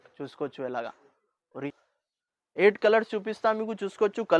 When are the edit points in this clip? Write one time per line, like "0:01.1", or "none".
0:01.7